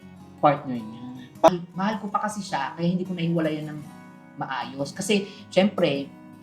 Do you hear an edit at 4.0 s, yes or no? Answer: no